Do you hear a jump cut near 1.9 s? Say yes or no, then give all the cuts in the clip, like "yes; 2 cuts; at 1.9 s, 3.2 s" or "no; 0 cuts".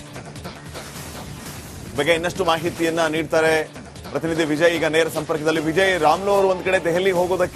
yes; 1 cut; at 1.9 s